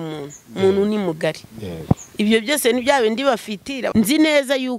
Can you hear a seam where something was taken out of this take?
yes; 1 cut; at 3.9 s

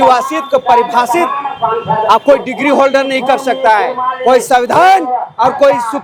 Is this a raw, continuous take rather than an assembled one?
yes; 0 cuts

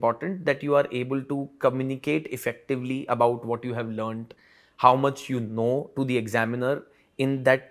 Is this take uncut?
yes; 0 cuts

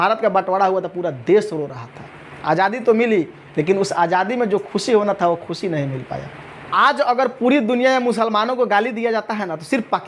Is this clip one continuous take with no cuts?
yes; 0 cuts

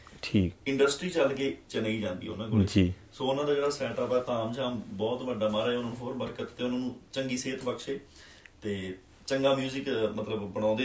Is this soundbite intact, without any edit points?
yes; 0 cuts

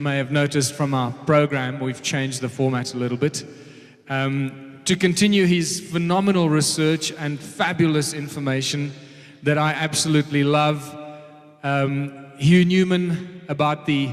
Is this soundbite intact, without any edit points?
yes; 0 cuts

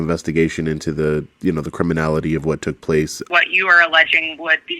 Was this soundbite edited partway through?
yes; 1 cut; at 3.2 s

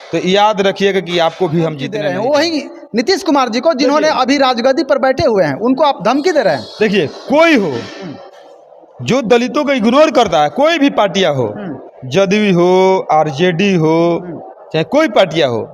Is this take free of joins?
no; 1 cut; at 1.9 s

